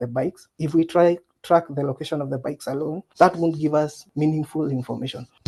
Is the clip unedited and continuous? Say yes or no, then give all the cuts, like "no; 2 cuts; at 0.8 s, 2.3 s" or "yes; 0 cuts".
yes; 0 cuts